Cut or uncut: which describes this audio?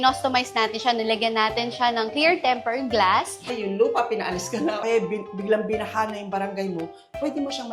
cut